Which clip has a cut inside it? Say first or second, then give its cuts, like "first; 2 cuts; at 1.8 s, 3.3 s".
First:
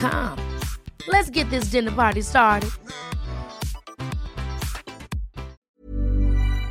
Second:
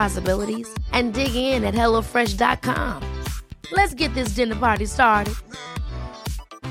first; 1 cut; at 5.6 s